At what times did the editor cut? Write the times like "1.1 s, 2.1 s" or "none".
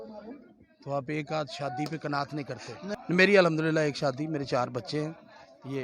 2.9 s